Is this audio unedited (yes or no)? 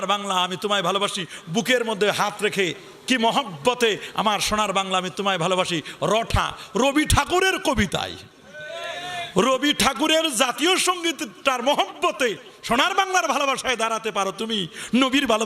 yes